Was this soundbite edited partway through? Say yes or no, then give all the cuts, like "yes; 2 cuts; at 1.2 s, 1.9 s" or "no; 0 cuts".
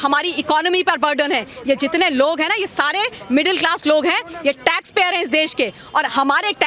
no; 0 cuts